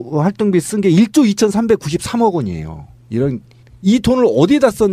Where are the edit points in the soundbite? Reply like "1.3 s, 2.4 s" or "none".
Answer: 2.4 s